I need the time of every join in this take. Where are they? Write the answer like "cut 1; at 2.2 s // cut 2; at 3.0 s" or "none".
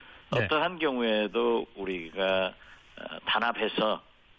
cut 1; at 3.2 s